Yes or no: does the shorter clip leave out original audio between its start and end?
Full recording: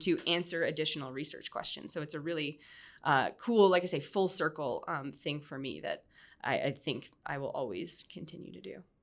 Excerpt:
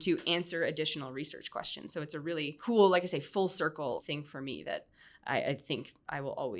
yes